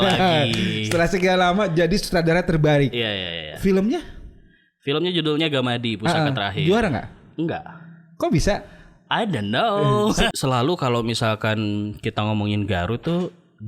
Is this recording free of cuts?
no; 1 cut; at 10.3 s

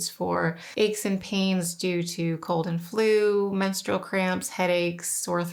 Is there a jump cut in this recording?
no; 0 cuts

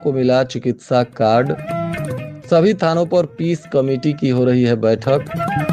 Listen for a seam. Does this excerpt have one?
no; 0 cuts

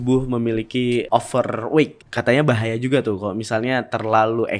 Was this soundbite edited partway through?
yes; 2 cuts; at 1.1 s, 2.0 s

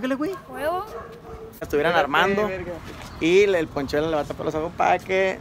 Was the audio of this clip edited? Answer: yes; 1 cut; at 1.7 s

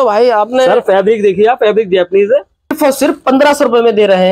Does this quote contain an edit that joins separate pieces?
yes; 1 cut; at 2.8 s

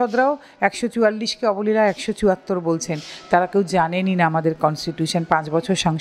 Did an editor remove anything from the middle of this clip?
no; 0 cuts

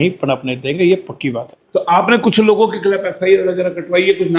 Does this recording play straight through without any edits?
yes; 0 cuts

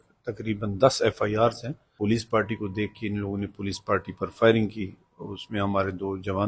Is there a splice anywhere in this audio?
yes; 1 cut; at 1.9 s

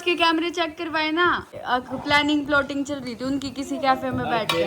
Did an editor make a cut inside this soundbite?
yes; 1 cut; at 1.6 s

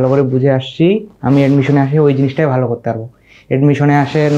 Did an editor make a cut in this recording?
no; 0 cuts

